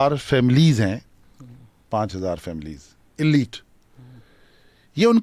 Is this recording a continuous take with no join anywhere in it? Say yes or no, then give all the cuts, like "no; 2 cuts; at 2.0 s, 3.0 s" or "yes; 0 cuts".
yes; 0 cuts